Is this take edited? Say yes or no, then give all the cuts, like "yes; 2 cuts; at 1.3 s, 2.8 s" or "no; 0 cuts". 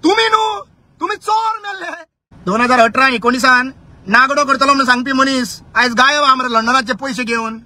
yes; 1 cut; at 2.3 s